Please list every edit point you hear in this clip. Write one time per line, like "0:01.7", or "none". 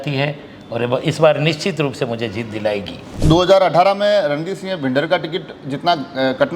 0:03.0